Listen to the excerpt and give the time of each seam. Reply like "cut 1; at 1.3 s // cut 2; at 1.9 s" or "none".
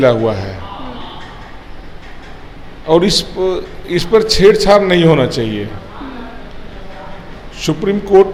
none